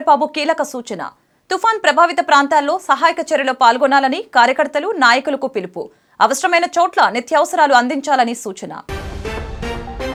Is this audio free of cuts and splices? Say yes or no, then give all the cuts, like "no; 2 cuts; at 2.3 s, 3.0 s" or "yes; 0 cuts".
yes; 0 cuts